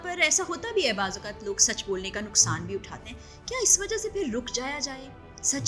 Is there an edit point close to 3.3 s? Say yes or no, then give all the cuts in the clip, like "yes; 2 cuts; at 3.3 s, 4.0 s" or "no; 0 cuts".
no; 0 cuts